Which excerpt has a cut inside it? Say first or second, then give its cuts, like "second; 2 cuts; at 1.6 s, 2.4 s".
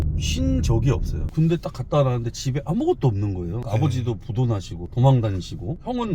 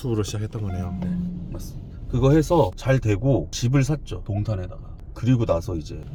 first; 3 cuts; at 1.2 s, 3.6 s, 4.8 s